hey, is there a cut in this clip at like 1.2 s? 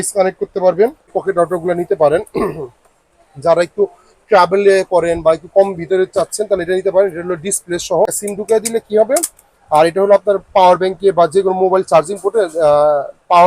yes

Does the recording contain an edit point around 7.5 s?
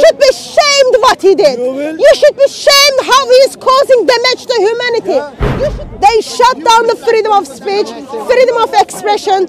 no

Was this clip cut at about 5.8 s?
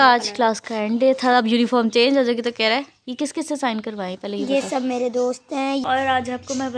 yes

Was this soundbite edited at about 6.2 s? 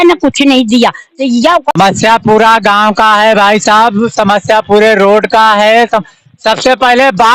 no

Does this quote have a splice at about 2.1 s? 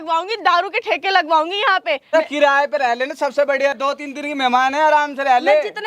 yes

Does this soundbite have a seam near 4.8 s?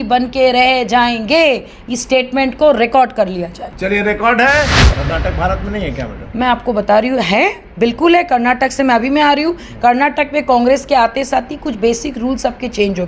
yes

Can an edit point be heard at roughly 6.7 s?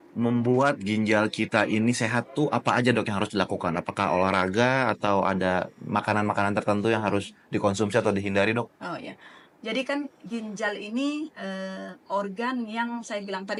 no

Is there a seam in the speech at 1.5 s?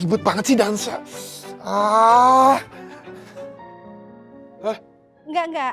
no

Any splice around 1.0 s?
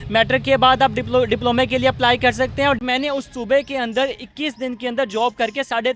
no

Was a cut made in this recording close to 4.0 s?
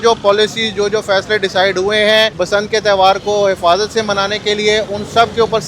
no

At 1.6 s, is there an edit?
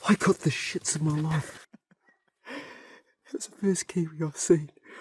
yes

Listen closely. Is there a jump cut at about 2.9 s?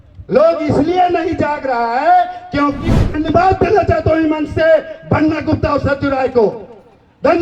yes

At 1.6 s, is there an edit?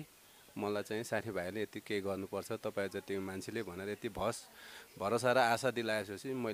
no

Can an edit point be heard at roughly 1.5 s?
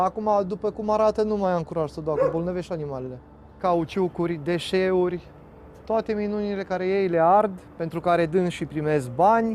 no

